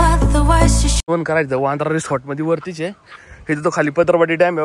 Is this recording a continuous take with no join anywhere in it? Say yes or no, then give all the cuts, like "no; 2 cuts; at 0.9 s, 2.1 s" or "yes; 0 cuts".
no; 1 cut; at 1.1 s